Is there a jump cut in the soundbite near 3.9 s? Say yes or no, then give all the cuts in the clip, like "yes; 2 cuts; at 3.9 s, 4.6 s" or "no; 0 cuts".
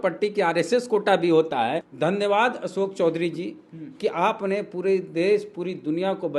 no; 1 cut; at 1.9 s